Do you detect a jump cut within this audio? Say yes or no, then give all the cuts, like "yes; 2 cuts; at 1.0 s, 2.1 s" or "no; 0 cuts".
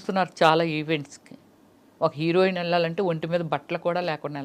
no; 0 cuts